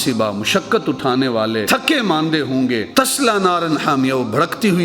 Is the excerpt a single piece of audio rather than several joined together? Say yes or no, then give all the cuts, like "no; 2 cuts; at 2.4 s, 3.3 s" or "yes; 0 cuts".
no; 2 cuts; at 1.6 s, 2.9 s